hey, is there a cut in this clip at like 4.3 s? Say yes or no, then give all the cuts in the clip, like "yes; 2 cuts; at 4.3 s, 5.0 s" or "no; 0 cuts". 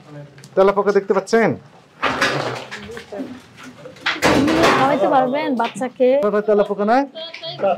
no; 1 cut; at 6.2 s